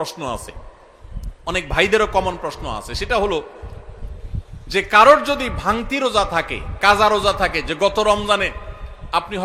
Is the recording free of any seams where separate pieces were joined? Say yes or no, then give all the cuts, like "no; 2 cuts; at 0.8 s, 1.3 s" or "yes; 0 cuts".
yes; 0 cuts